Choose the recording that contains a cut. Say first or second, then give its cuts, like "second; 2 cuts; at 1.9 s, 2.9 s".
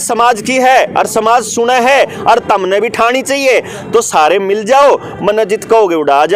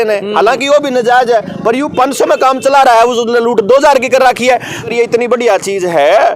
second; 1 cut; at 4.9 s